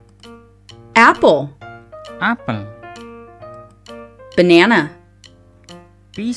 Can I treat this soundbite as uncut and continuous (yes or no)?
no